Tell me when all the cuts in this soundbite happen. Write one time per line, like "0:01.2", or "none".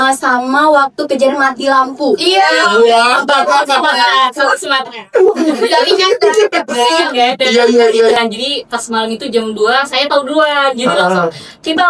0:08.2